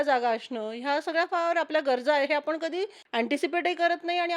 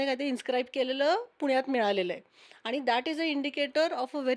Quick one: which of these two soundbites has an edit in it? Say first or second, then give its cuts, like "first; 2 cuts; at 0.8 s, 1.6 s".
first; 1 cut; at 3.0 s